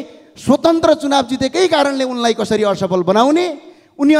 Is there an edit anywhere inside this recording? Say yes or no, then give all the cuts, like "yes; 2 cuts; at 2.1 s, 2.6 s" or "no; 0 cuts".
no; 0 cuts